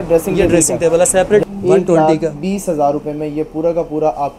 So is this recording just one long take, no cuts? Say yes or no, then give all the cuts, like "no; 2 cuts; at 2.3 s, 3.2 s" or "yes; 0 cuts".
no; 1 cut; at 1.4 s